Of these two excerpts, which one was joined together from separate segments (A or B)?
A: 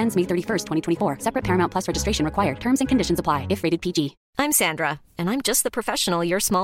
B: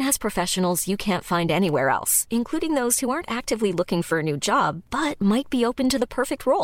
A